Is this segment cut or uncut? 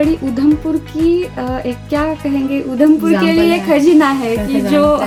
uncut